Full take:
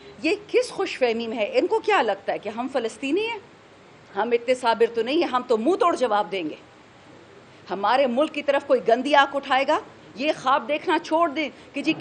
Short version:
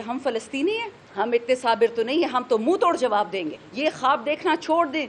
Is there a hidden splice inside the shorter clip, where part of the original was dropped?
yes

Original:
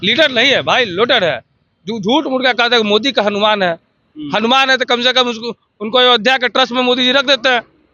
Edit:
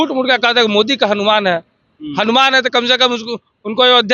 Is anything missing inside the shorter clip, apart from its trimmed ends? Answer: no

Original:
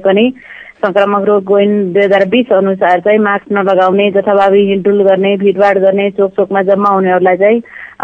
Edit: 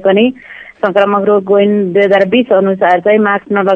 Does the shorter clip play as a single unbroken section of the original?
yes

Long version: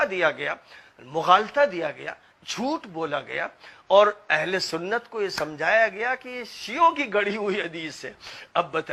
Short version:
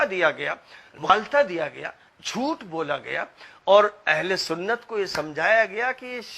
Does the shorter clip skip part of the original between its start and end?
yes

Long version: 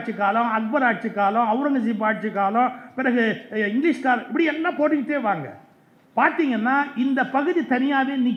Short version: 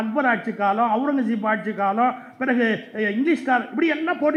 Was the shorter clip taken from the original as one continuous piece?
yes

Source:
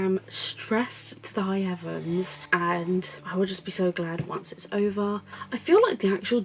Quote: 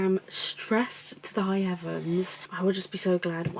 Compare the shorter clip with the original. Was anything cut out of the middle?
yes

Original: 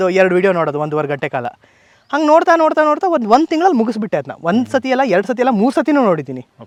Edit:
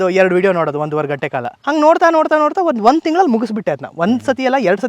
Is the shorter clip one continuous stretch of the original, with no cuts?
no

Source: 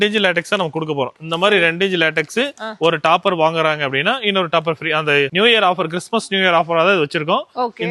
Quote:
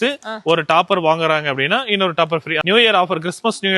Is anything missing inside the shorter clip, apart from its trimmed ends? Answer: yes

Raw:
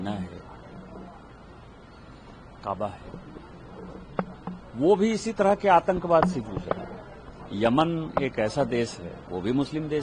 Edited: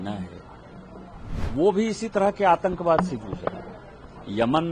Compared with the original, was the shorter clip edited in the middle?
yes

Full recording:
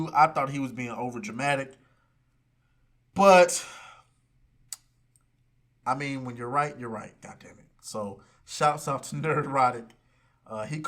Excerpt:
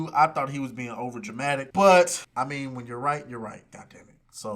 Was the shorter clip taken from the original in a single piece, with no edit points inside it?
no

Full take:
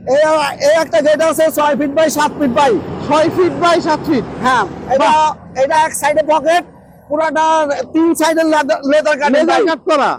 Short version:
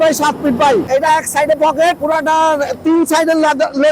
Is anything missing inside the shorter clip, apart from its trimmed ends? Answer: yes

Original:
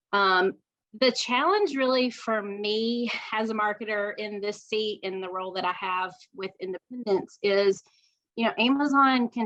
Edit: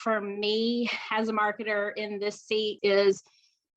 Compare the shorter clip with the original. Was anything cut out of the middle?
yes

